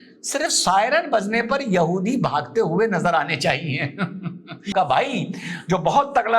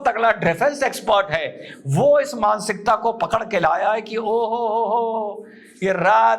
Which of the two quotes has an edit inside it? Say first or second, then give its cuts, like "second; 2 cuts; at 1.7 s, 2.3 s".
first; 1 cut; at 4.7 s